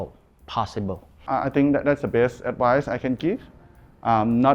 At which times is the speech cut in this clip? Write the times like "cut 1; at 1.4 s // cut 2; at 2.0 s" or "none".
cut 1; at 1.1 s